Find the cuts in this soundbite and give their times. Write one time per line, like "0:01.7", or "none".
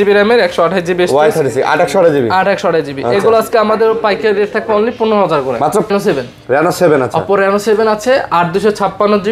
0:05.9